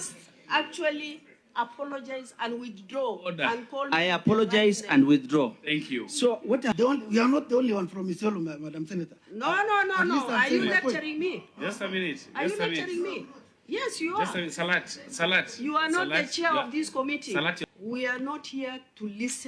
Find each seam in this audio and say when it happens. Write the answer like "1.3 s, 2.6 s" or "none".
6.7 s, 17.6 s